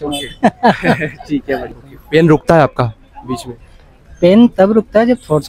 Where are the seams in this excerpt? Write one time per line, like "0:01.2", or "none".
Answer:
0:01.7